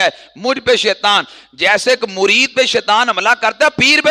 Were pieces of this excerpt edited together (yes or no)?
no